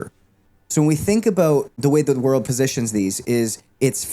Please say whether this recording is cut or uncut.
cut